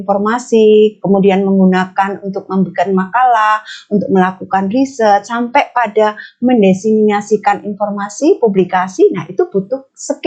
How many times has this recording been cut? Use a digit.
0